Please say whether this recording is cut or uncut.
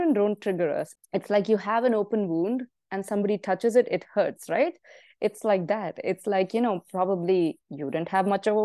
cut